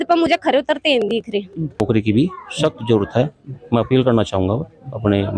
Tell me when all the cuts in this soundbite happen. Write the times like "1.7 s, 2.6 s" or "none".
1.8 s